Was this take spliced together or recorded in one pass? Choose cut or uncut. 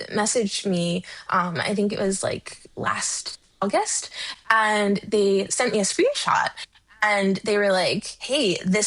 uncut